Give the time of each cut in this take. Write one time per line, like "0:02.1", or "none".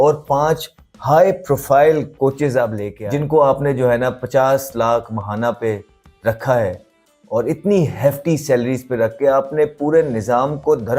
0:02.9